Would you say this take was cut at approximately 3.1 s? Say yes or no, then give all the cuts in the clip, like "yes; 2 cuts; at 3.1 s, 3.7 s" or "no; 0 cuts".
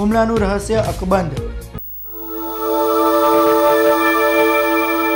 no; 1 cut; at 1.8 s